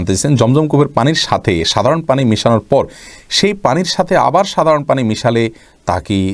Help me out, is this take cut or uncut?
uncut